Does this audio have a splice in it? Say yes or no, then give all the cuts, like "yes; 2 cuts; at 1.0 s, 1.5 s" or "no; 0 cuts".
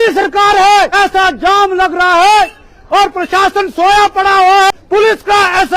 yes; 2 cuts; at 0.9 s, 4.7 s